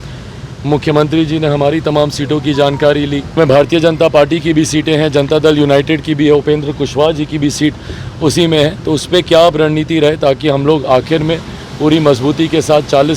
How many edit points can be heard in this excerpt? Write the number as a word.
one